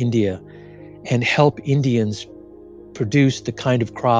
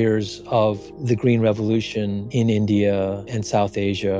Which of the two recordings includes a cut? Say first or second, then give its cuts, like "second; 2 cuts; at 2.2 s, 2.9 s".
second; 2 cuts; at 0.9 s, 2.2 s